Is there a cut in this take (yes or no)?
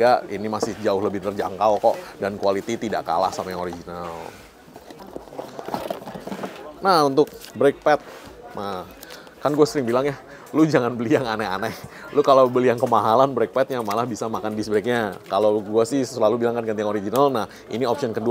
no